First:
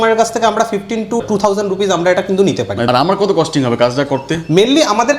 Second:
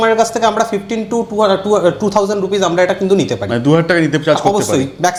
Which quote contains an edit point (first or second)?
first